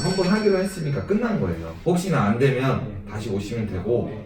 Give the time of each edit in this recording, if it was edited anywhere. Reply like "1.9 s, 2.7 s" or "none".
none